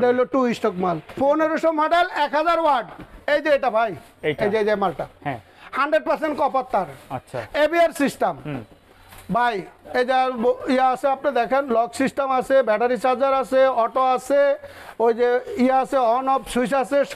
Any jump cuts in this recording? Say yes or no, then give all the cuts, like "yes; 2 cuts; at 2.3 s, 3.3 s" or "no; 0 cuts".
yes; 1 cut; at 1.1 s